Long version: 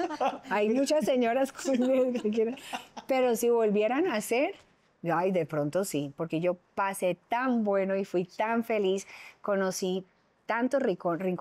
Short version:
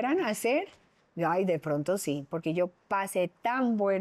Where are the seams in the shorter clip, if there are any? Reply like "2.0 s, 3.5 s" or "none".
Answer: none